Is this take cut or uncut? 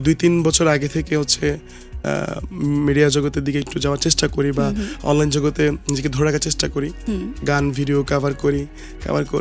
uncut